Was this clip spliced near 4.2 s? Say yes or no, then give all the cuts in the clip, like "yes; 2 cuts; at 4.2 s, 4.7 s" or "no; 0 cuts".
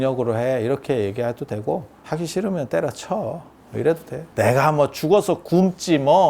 yes; 2 cuts; at 1.9 s, 4.2 s